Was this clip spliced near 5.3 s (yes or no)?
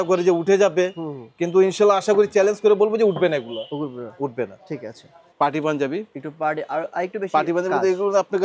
yes